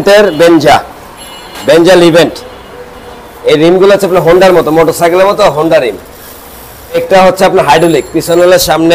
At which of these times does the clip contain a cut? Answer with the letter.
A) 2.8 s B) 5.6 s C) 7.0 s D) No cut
C